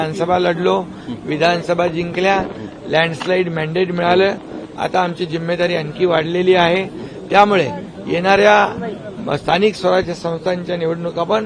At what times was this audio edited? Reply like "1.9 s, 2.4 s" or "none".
none